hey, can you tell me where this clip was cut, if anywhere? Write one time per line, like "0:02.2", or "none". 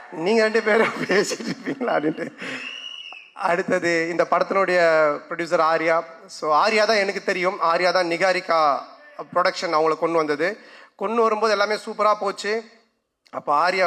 none